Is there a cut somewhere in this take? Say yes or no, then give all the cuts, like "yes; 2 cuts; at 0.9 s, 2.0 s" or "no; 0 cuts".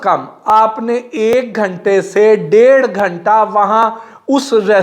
no; 0 cuts